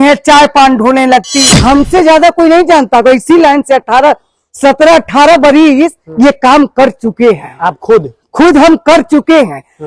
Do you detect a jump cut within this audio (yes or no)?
yes